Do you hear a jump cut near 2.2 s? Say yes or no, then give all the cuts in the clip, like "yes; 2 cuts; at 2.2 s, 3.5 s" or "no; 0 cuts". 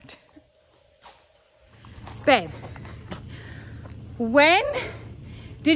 yes; 1 cut; at 2.2 s